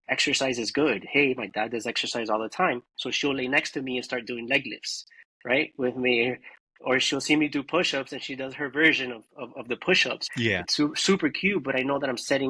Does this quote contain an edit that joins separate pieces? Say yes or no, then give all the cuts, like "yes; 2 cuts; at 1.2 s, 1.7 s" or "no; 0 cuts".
yes; 1 cut; at 10.3 s